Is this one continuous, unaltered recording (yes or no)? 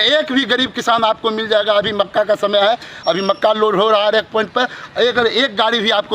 yes